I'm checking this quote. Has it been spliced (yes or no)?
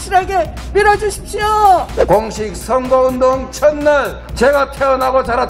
yes